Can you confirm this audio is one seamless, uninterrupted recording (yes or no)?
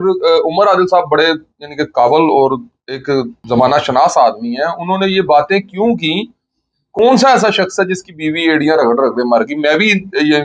no